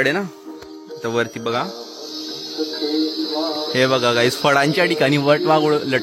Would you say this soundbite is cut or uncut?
uncut